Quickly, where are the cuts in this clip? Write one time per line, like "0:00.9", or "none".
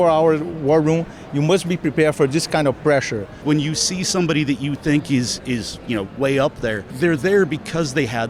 0:03.4